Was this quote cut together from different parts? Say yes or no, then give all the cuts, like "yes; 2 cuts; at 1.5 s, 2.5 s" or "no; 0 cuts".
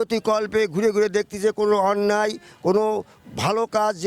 no; 0 cuts